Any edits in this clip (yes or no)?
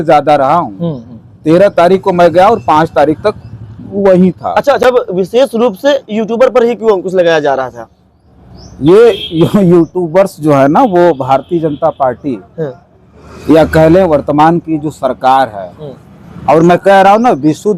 yes